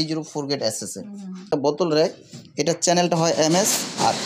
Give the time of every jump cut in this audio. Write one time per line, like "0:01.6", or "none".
0:01.5

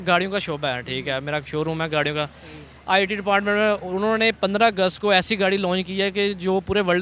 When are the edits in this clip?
none

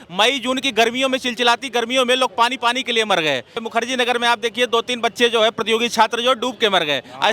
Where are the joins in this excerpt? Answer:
0:03.6

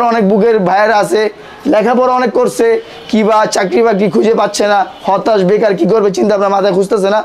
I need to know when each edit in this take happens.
none

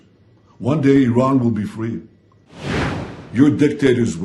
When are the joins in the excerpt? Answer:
0:02.8

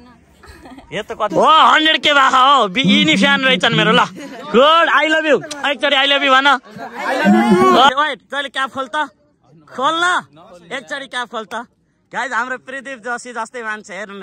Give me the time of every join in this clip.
0:01.3
0:07.9

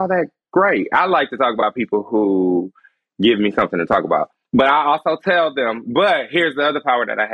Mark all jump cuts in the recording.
0:04.4

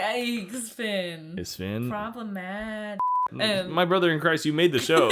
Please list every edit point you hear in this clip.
0:03.2

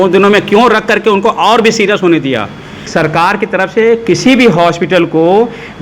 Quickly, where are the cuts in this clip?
0:02.8

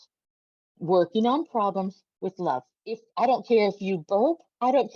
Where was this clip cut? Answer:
0:03.1

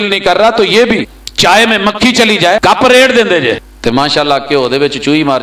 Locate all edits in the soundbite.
0:01.2
0:02.6
0:03.7

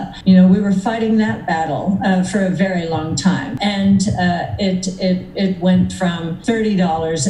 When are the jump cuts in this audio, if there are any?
0:03.5

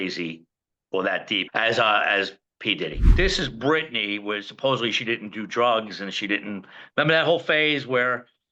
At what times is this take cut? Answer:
0:01.5
0:03.1

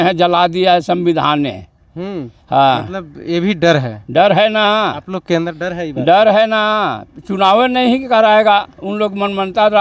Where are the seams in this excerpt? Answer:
none

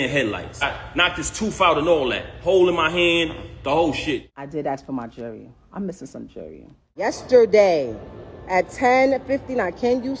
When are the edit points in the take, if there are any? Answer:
0:04.4
0:07.1

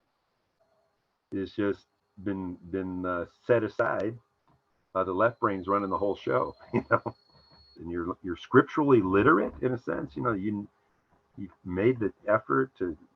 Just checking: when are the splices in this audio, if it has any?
0:07.8

